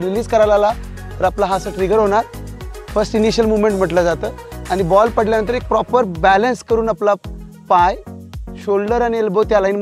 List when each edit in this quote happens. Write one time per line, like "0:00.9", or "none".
none